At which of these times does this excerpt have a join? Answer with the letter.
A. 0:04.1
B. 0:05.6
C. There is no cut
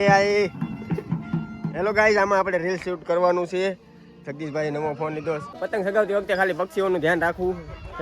B